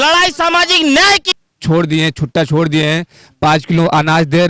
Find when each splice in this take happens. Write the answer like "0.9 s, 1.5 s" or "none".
1.3 s